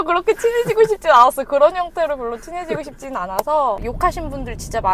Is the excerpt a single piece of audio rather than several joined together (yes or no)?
no